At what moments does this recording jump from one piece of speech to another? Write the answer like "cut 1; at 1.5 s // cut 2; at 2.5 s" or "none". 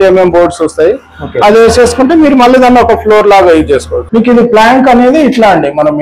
cut 1; at 4.0 s